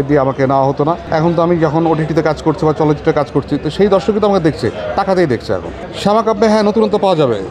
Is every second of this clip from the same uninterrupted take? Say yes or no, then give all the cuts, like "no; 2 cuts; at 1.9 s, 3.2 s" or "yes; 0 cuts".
no; 2 cuts; at 1.0 s, 5.8 s